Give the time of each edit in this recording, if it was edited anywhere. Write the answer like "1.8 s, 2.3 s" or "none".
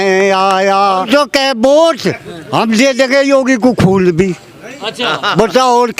1.1 s